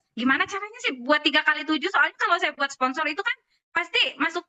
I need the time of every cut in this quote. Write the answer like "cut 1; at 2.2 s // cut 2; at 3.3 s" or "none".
none